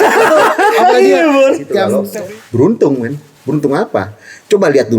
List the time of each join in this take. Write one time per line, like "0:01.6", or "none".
0:02.0